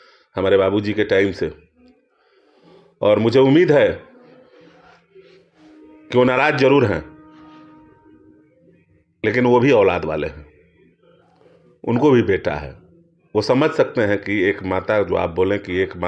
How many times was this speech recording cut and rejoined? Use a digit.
0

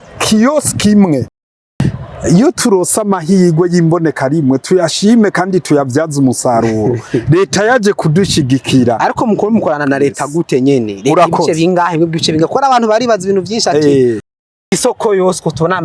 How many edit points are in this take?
2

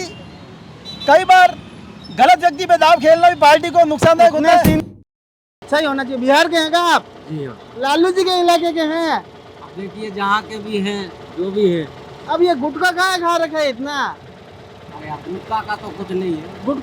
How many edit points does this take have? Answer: 1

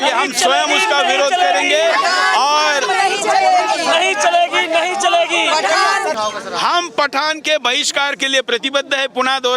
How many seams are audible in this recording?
1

